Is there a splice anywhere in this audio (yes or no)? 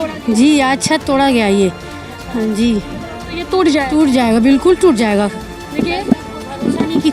no